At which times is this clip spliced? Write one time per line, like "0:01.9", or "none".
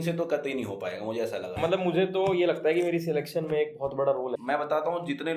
0:01.6
0:04.4